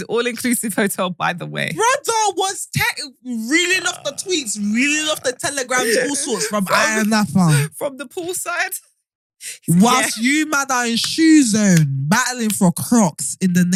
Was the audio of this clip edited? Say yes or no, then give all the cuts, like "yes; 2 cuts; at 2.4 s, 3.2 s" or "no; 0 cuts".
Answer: no; 0 cuts